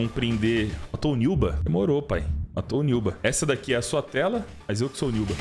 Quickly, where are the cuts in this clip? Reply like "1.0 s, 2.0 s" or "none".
none